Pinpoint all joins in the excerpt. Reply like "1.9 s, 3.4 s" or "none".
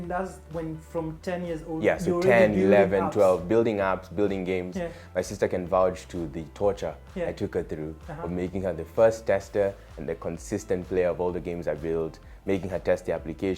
none